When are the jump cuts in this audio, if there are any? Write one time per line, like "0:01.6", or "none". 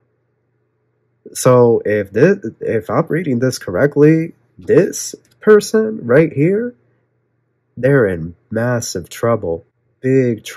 none